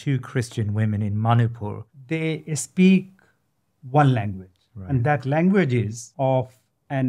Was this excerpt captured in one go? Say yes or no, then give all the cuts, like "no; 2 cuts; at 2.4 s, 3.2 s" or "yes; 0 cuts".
no; 2 cuts; at 1.9 s, 6.0 s